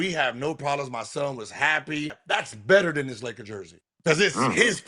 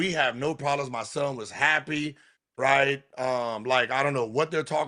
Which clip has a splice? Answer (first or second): first